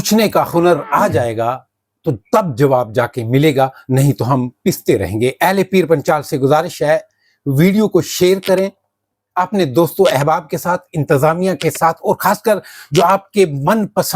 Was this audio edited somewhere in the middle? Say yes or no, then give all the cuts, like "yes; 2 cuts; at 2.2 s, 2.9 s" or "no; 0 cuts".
no; 0 cuts